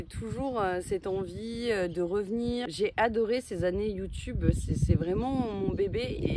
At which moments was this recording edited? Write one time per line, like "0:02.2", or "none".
0:02.7